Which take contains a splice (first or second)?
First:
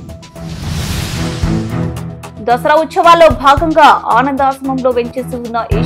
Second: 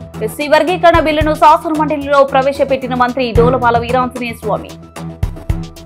first